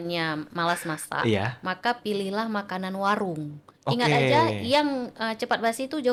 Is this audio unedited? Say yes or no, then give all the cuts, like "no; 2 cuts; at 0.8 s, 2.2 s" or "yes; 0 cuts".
yes; 0 cuts